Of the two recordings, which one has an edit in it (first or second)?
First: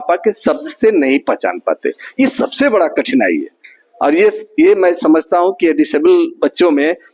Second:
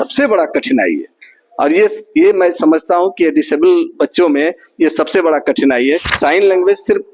second